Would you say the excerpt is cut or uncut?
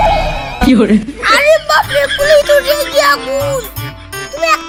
uncut